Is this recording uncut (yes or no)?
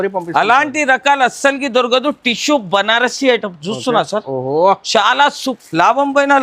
no